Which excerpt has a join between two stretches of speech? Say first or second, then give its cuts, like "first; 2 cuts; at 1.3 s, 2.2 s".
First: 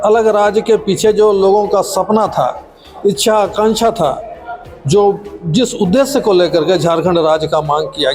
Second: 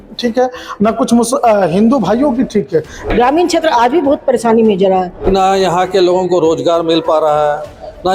second; 2 cuts; at 3.0 s, 5.2 s